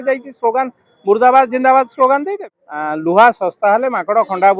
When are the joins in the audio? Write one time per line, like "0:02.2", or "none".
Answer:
0:02.4